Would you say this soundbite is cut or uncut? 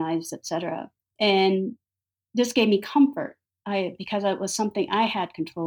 cut